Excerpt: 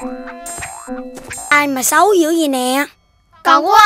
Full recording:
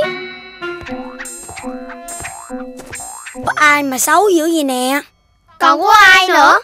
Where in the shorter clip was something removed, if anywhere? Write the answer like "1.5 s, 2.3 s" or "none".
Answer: 1.5 s